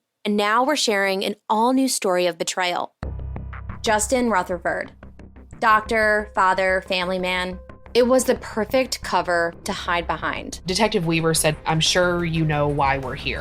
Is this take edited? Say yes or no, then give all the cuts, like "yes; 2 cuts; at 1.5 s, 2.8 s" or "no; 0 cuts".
yes; 1 cut; at 2.9 s